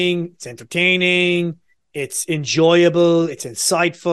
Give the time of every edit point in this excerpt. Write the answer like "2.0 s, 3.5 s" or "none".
none

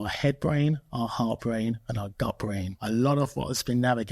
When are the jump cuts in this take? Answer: 2.7 s

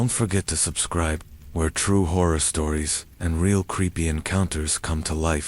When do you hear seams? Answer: 1.2 s

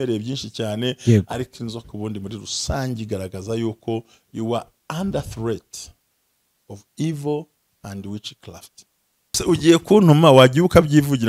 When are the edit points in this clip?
9.4 s

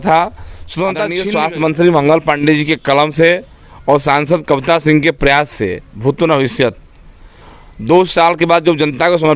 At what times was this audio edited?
1.2 s

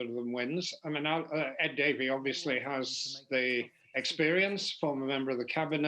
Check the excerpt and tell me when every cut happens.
none

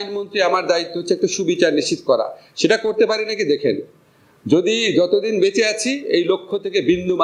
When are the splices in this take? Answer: none

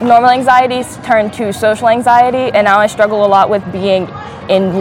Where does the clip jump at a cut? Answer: none

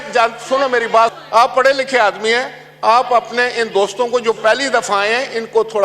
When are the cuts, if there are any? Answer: 1.1 s

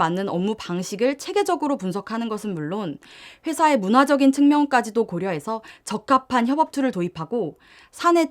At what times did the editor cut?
none

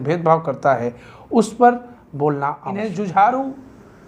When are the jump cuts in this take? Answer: 2.6 s

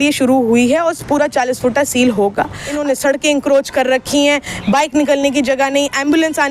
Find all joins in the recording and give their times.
2.6 s

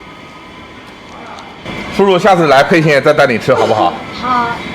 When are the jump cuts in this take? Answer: 1.7 s

